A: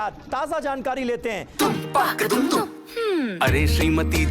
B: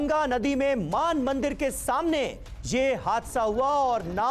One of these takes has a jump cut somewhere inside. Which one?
A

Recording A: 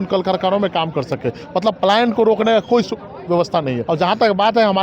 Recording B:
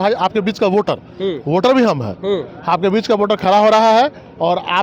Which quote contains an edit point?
A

